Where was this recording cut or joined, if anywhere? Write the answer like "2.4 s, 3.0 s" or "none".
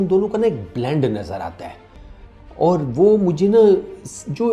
none